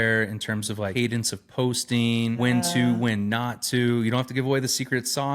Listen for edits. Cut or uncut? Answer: cut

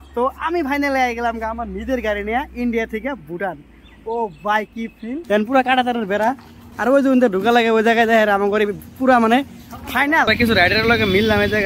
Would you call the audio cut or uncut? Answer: cut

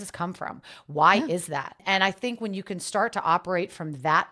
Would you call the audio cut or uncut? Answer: cut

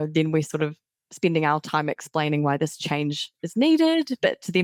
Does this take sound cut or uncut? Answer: uncut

